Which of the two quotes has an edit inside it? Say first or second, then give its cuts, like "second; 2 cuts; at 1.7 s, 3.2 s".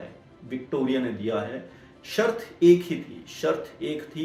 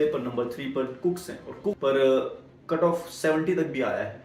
second; 1 cut; at 1.8 s